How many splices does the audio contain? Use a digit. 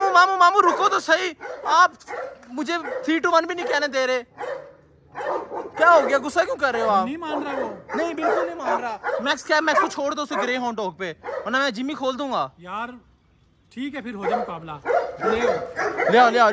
0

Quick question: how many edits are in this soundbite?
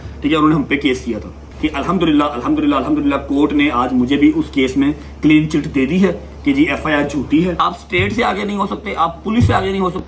2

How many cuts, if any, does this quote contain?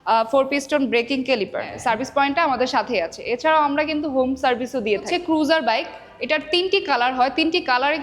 2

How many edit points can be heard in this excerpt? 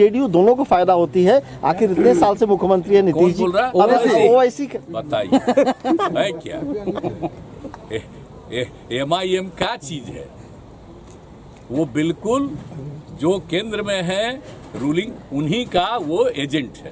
0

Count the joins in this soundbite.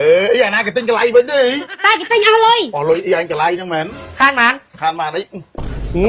1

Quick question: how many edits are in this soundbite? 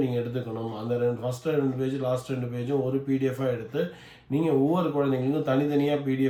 0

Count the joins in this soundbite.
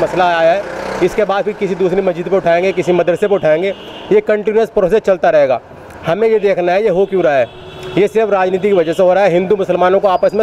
0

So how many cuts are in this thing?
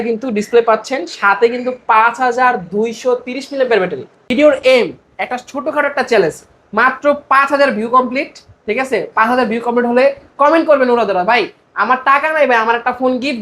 1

